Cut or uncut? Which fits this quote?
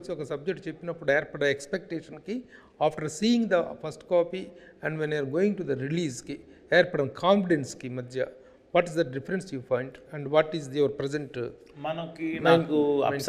uncut